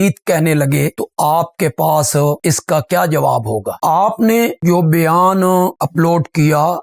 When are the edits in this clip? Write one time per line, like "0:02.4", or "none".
none